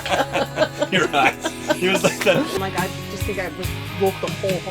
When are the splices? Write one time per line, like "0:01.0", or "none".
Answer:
0:02.6